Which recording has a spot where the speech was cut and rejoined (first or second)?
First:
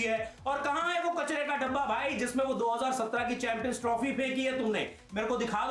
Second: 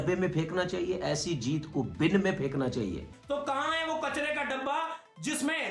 second